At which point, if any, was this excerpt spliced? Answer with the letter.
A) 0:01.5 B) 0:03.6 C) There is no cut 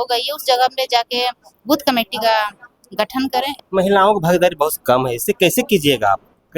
B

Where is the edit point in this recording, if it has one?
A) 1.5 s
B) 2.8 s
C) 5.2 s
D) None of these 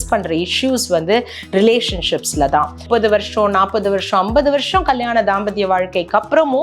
B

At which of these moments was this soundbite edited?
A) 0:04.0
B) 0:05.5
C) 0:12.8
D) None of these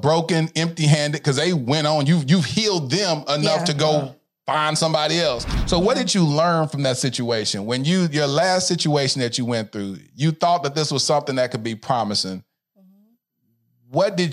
B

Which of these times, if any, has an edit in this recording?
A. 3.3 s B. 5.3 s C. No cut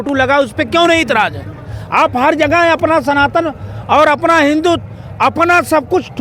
C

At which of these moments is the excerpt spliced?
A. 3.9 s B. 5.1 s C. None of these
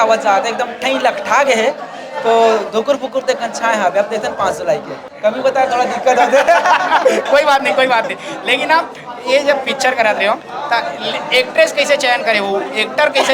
B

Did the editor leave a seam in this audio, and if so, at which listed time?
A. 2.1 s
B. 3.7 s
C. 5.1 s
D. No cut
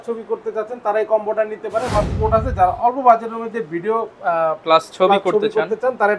A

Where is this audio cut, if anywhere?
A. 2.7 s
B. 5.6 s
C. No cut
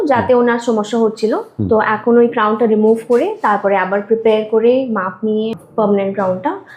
B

